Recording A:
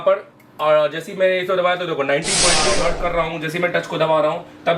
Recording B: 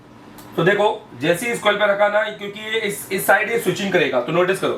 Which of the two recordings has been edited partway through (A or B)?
A